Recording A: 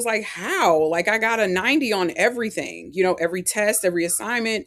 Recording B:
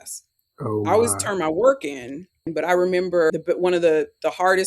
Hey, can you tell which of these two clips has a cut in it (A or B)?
B